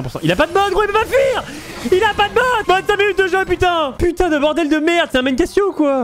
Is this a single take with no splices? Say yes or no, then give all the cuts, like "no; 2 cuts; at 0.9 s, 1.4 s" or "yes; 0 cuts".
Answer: yes; 0 cuts